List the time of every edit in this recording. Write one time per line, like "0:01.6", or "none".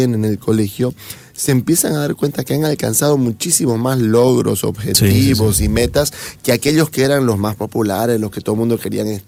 none

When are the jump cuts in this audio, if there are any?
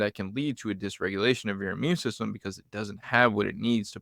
none

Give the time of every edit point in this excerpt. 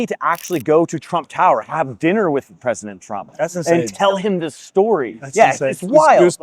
none

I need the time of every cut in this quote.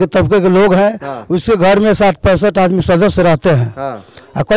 none

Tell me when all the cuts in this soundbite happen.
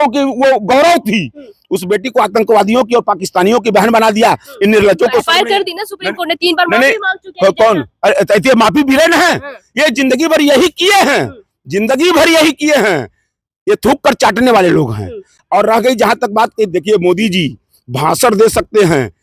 none

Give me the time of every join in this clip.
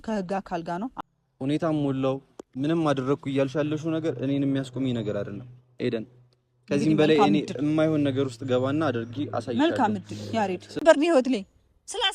0:01.0
0:10.7

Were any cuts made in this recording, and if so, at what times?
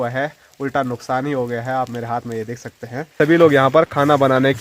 0:03.1

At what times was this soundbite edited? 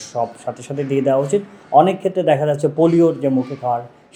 none

